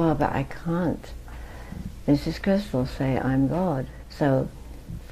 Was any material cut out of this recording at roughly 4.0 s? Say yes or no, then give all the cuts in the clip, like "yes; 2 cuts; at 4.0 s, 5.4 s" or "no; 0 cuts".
yes; 1 cut; at 4.0 s